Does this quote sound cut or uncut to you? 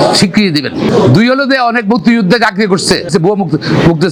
uncut